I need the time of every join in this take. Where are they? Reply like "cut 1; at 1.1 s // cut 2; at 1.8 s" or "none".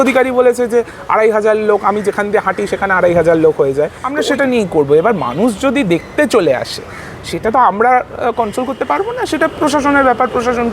cut 1; at 4.0 s